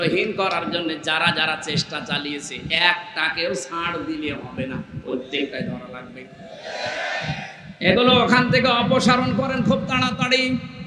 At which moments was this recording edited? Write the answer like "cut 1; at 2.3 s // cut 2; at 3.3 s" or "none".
none